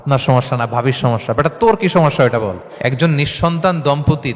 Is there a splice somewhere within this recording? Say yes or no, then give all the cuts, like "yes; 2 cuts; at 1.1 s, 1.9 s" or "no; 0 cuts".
yes; 1 cut; at 2.7 s